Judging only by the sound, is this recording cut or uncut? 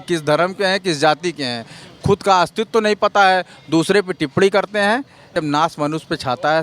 cut